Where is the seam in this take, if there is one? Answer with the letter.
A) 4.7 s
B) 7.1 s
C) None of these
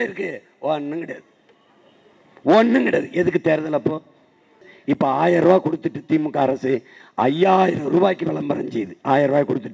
A